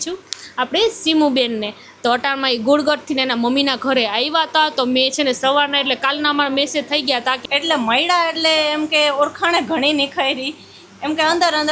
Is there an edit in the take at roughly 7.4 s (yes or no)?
yes